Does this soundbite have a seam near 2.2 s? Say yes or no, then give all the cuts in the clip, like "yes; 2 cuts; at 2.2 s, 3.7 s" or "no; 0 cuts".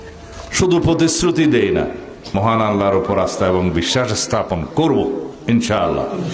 yes; 1 cut; at 2.2 s